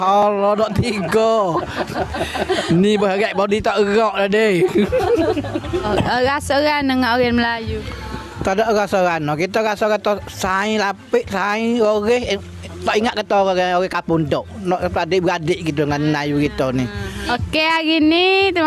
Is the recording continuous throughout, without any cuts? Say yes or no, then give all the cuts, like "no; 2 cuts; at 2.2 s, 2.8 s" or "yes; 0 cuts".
yes; 0 cuts